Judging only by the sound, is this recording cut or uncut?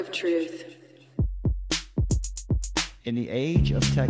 cut